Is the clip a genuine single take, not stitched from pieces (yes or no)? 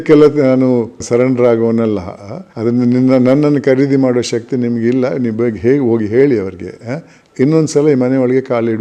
yes